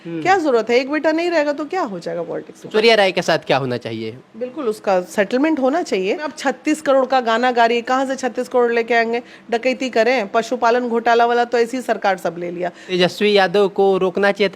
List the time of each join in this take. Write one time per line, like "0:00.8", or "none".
0:02.7
0:06.3
0:12.9